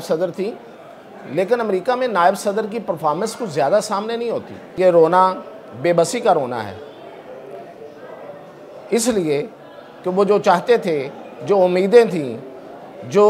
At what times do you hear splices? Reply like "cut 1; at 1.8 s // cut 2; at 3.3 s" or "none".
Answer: cut 1; at 4.6 s